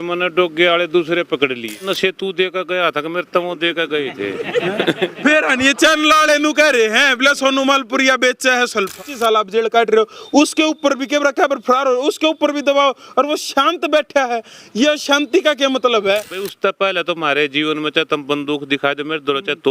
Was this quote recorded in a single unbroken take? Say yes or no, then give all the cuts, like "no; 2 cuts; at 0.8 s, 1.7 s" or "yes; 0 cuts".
no; 3 cuts; at 1.9 s, 9.0 s, 16.5 s